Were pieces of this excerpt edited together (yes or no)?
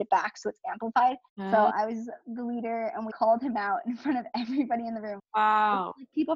yes